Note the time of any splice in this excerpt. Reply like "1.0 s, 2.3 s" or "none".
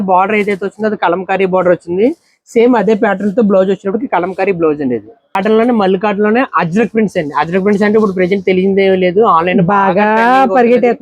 5.4 s